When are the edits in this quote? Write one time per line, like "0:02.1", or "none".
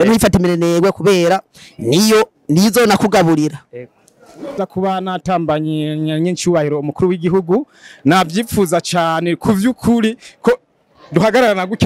0:04.6